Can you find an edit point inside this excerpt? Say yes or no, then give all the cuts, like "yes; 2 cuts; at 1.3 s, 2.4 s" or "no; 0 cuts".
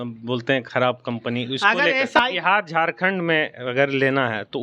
yes; 1 cut; at 2.2 s